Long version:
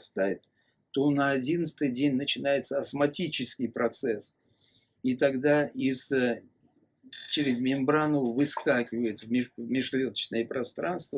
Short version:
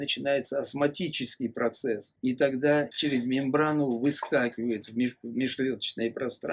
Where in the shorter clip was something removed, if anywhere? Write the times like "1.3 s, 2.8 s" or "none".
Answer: 2.1 s, 2.9 s